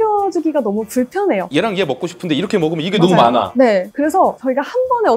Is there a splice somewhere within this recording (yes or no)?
yes